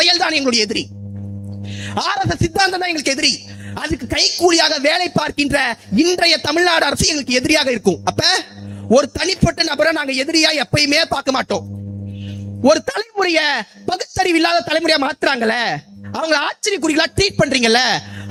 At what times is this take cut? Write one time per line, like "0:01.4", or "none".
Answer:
none